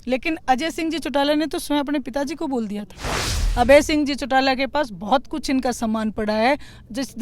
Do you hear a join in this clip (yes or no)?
yes